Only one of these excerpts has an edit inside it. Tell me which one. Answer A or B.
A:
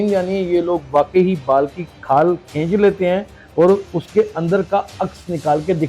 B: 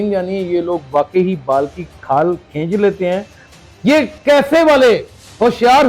B